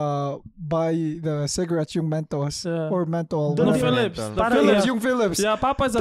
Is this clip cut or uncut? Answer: uncut